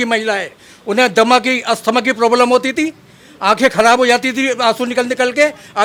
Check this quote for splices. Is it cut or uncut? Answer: uncut